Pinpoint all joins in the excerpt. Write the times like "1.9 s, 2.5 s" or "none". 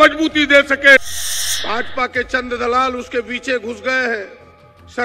1.2 s